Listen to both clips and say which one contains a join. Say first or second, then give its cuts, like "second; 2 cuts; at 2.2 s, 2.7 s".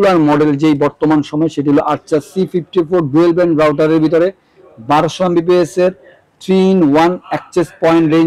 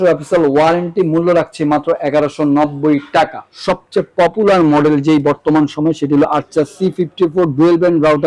second; 1 cut; at 3.5 s